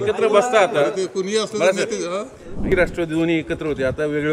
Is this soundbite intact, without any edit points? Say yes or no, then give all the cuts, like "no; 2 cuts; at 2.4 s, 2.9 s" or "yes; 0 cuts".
no; 1 cut; at 2.7 s